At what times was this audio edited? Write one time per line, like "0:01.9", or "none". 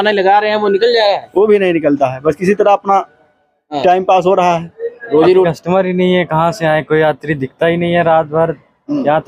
0:05.5